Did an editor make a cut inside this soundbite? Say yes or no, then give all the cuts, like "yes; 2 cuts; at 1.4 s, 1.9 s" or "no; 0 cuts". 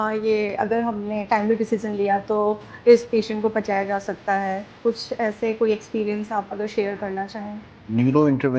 yes; 1 cut; at 7.7 s